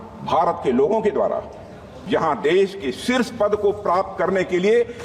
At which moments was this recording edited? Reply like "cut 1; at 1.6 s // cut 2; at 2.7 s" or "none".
cut 1; at 1.9 s